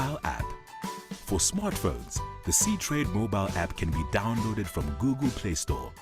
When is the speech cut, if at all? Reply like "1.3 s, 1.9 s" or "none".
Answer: none